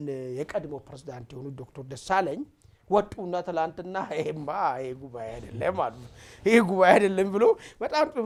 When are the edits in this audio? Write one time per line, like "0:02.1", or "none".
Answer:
none